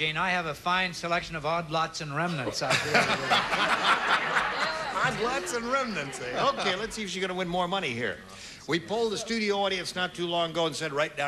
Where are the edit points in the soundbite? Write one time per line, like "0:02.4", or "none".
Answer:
0:09.5

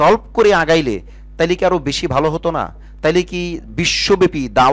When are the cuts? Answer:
none

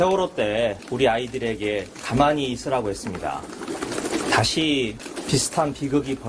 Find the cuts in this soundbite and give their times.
0:00.8
0:01.9
0:03.5
0:05.1

